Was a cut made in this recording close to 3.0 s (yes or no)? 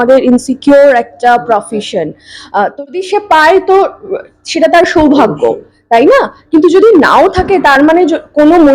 yes